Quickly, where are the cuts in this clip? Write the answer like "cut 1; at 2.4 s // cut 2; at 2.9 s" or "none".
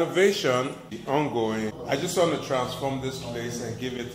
cut 1; at 1.0 s // cut 2; at 1.8 s